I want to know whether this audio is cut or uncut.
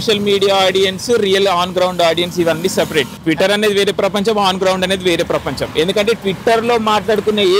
uncut